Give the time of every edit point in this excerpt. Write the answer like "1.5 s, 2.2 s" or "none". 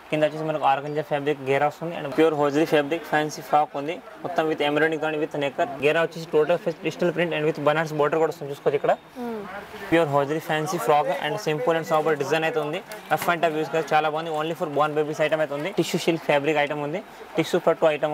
2.1 s, 5.8 s, 9.5 s, 15.7 s

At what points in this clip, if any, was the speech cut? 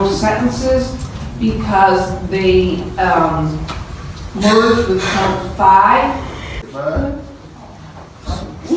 6.7 s

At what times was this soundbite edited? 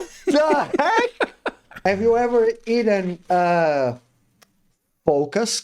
1.9 s

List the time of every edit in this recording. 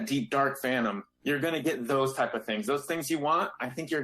1.1 s

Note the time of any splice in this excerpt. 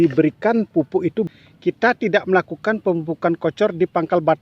1.3 s

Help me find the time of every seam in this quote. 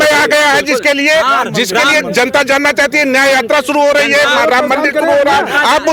none

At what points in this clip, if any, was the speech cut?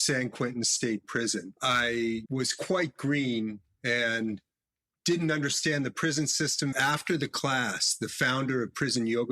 1.5 s, 2.2 s, 6.8 s

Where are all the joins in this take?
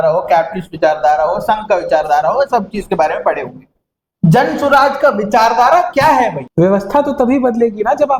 6.4 s

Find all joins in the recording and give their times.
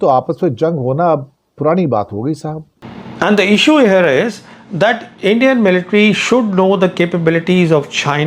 2.7 s

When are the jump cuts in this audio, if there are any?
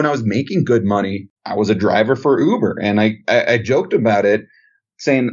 1.3 s

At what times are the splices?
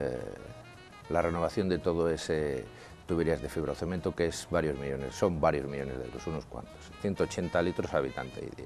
7.0 s

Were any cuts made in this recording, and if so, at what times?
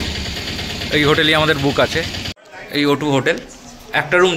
2.2 s

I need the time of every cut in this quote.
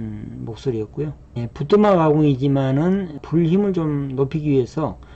1.4 s, 3.2 s

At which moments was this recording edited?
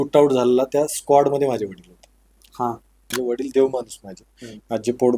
3.1 s

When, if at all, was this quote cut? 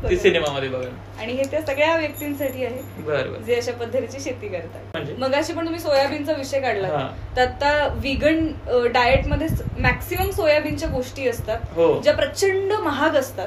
5.1 s

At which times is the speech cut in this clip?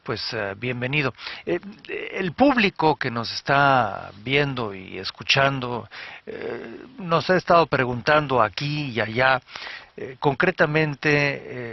none

